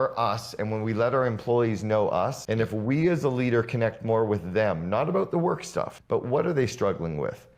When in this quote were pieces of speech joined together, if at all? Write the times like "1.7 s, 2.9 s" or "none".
2.4 s, 6.0 s